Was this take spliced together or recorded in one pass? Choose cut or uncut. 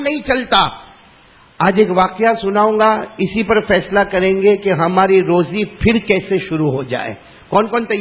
uncut